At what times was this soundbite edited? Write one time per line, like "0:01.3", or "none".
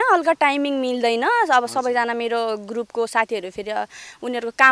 none

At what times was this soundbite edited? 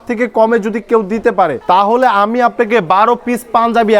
0:01.6

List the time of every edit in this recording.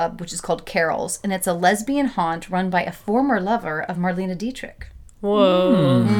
none

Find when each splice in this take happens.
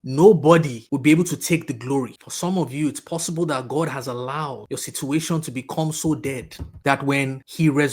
0:04.6

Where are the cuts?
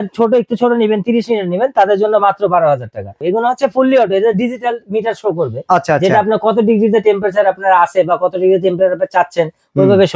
0:03.2

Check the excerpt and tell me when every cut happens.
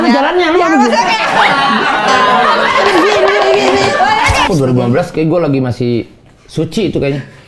0:04.5

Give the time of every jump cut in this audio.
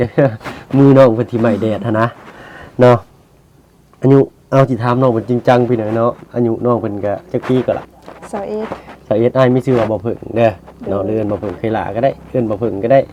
none

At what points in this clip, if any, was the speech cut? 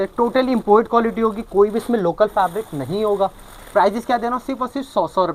none

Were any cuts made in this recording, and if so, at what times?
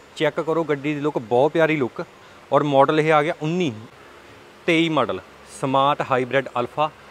0:03.9

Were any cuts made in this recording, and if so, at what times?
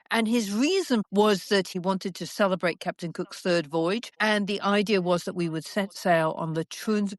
0:01.1
0:01.8

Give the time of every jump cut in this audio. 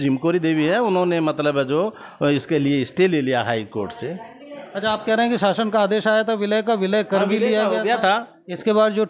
none

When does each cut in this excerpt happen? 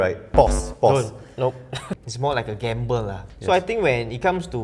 0:01.7
0:03.2

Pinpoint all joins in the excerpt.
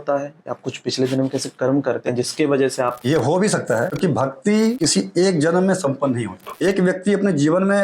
0:03.0
0:03.9
0:04.8
0:06.5

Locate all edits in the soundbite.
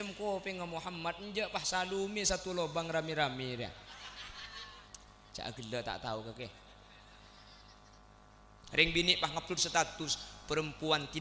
0:08.5

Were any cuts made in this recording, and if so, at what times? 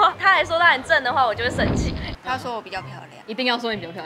none

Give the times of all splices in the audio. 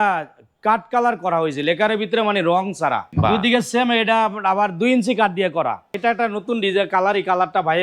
0:03.1
0:05.9

